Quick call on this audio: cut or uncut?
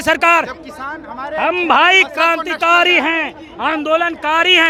uncut